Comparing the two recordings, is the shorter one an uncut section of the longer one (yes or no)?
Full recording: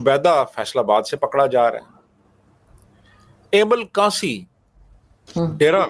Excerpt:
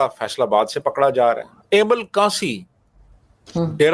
no